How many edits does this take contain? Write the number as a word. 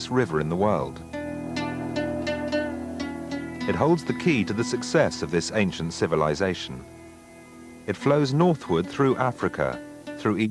one